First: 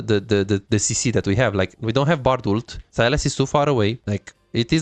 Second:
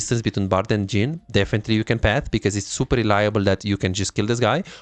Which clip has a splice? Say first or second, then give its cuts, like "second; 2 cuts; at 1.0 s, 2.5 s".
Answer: first; 2 cuts; at 2.8 s, 4.0 s